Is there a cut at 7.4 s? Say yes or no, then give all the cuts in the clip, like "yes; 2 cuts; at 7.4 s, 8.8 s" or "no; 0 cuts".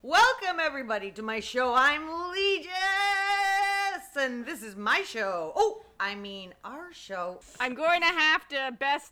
yes; 1 cut; at 7.4 s